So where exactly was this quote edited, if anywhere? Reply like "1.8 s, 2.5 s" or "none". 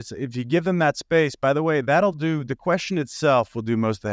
none